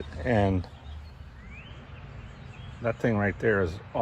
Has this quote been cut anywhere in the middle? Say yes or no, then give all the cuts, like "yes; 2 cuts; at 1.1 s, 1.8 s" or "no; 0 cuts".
yes; 1 cut; at 1.2 s